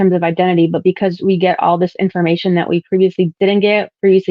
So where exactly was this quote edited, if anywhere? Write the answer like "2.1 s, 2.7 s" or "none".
3.3 s